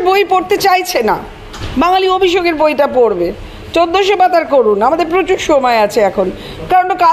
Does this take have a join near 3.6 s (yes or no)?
no